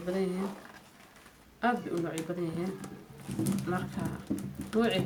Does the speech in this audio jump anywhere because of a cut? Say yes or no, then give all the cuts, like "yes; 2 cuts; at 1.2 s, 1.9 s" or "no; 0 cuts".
no; 0 cuts